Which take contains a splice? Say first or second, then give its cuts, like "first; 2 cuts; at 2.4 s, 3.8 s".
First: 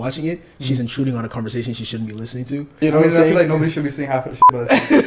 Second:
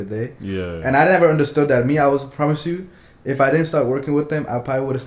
first; 1 cut; at 2.8 s